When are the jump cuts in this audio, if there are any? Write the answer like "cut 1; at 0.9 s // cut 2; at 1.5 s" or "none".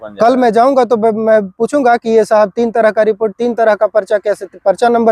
none